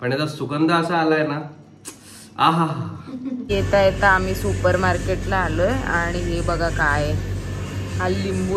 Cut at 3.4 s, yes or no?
yes